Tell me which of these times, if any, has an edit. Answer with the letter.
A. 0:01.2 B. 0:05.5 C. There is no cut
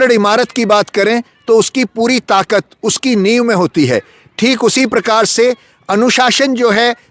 C